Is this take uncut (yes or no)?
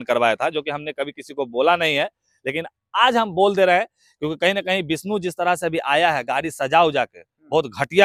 yes